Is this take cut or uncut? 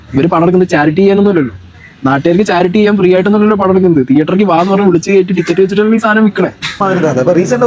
cut